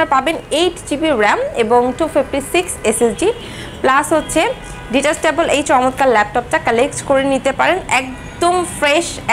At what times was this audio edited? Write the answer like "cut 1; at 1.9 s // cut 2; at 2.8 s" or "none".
cut 1; at 3.6 s